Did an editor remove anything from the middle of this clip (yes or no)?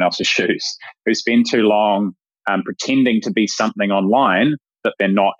no